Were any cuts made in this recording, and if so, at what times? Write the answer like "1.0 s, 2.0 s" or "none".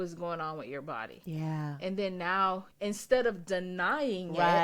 2.7 s